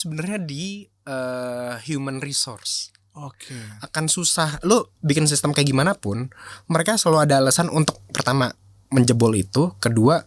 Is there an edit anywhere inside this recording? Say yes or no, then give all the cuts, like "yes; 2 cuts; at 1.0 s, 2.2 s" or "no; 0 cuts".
no; 0 cuts